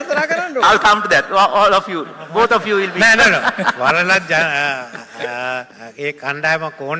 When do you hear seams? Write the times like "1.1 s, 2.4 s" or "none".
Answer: 5.8 s